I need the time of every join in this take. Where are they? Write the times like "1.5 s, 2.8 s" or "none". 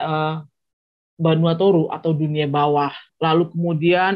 3.0 s

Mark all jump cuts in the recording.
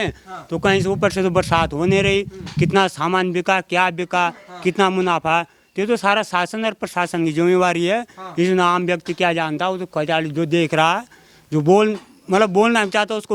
none

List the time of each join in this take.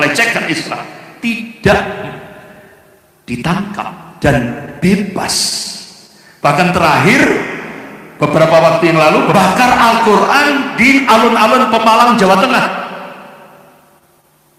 none

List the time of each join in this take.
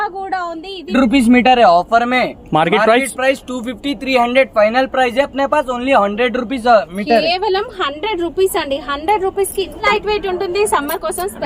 0.9 s, 9.8 s

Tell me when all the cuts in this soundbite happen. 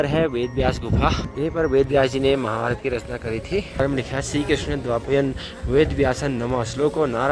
1.2 s, 3.8 s

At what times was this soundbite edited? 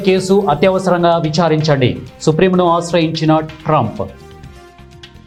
none

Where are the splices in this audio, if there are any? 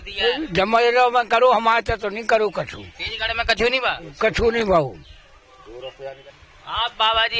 6.2 s

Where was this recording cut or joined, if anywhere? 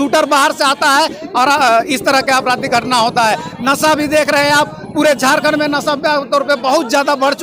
none

